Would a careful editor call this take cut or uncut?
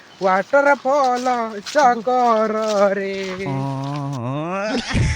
cut